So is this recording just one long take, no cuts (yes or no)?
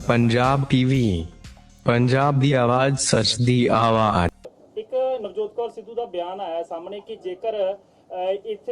no